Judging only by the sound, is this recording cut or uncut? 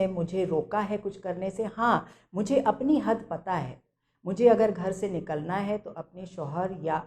uncut